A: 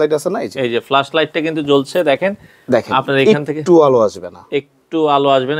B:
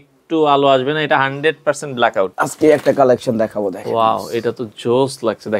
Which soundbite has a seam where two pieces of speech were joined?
B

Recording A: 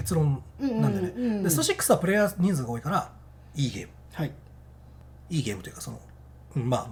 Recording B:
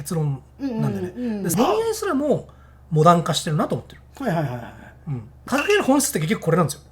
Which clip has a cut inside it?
B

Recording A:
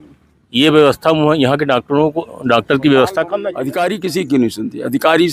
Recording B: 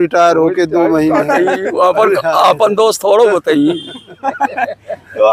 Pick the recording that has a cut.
A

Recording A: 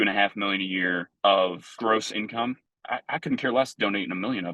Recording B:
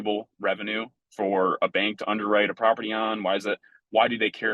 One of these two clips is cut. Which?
A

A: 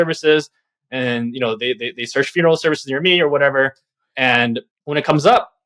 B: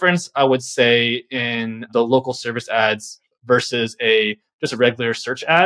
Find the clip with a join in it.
A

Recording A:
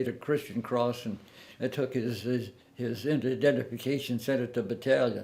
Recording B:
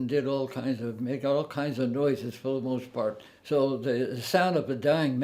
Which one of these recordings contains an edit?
B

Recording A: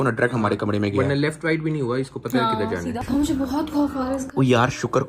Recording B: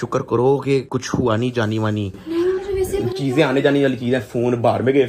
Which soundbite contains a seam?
A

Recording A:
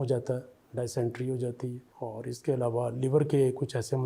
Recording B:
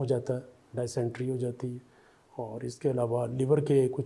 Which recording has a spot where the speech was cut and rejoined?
A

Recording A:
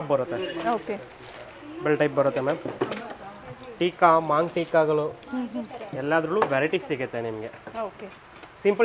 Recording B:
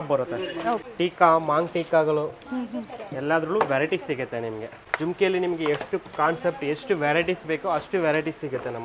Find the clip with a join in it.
B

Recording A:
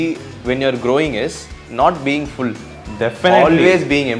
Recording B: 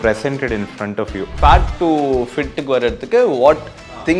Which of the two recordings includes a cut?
B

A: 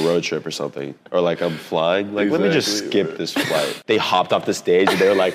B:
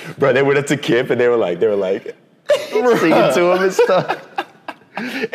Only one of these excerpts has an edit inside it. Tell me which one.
A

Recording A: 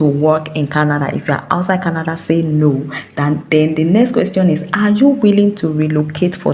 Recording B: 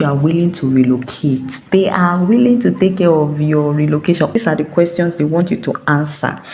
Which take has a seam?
B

